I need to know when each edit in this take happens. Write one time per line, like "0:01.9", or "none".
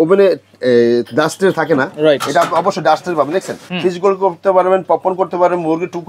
0:03.6